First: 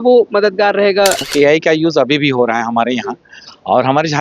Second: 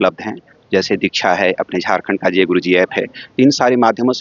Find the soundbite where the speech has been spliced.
first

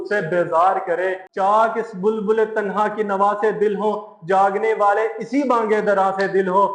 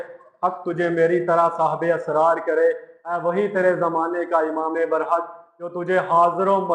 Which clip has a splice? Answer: first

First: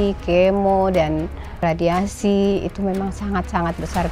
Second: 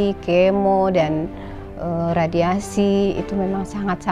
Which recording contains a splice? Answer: first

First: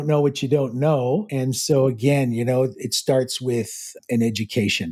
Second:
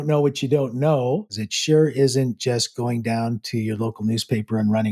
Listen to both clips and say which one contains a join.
second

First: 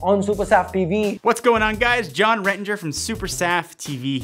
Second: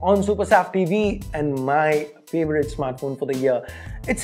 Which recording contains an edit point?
first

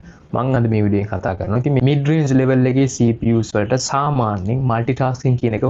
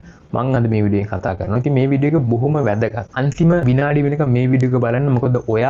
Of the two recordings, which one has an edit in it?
first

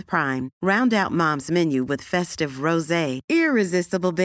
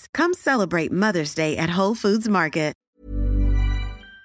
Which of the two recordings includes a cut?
second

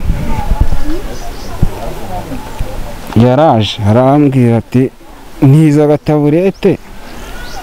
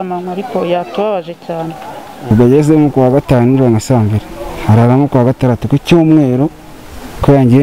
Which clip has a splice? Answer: second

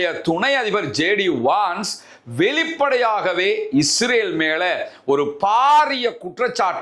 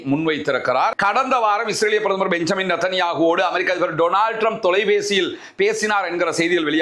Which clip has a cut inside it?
second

